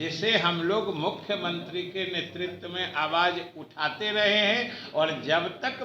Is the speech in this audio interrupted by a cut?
no; 0 cuts

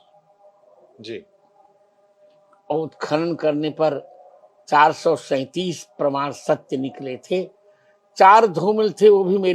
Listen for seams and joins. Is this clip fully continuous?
yes; 0 cuts

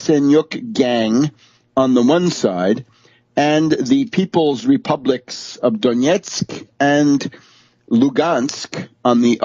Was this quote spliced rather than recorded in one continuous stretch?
yes; 1 cut; at 6.0 s

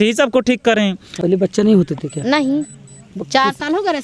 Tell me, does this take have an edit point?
yes; 1 cut; at 1.1 s

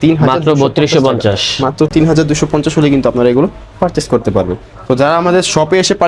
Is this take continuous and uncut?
yes; 0 cuts

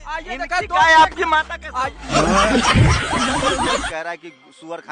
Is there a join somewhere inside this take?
yes; 2 cuts; at 1.8 s, 3.9 s

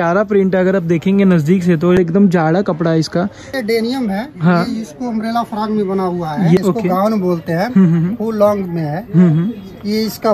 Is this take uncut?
no; 3 cuts; at 2.0 s, 3.5 s, 6.6 s

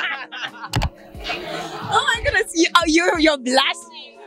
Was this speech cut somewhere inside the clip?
no; 0 cuts

